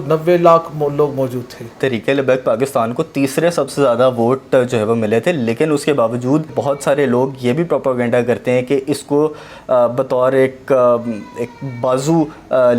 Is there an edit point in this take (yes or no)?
yes